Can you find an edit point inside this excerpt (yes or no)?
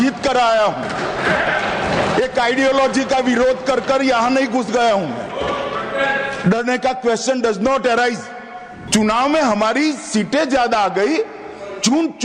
yes